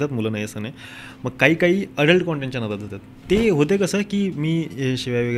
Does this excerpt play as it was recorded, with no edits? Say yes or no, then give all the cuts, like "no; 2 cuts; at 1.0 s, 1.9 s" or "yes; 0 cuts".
no; 1 cut; at 3.2 s